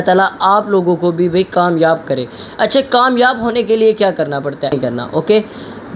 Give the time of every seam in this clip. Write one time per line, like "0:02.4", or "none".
0:04.8